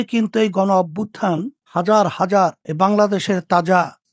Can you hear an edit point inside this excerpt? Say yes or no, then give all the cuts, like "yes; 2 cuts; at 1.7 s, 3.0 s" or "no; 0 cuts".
no; 0 cuts